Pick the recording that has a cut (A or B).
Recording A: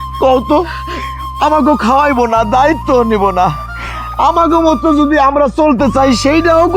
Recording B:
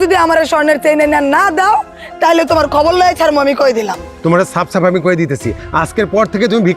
B